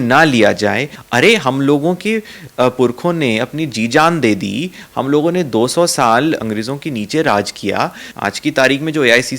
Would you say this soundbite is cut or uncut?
cut